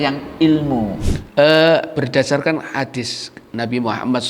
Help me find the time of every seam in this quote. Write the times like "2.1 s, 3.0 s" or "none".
1.1 s